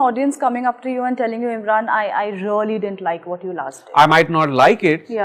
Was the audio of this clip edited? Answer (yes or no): no